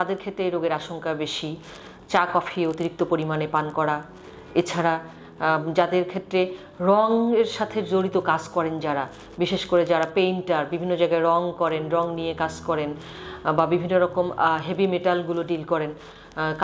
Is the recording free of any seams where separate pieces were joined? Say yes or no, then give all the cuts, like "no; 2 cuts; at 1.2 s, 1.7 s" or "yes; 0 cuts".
yes; 0 cuts